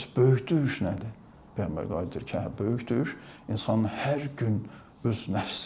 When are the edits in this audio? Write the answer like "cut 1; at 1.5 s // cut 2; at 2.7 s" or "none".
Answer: none